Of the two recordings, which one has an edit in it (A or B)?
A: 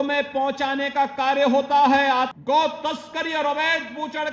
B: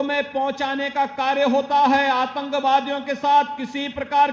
A